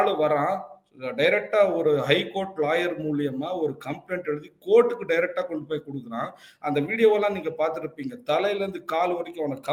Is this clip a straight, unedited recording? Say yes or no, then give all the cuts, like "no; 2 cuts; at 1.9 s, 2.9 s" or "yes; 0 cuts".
yes; 0 cuts